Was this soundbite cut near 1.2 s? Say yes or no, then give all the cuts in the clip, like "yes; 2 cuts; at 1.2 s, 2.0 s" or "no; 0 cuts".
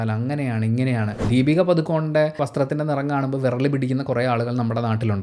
yes; 1 cut; at 1.2 s